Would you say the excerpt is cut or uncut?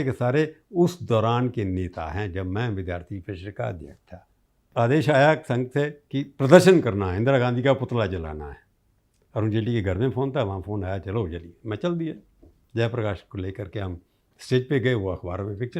cut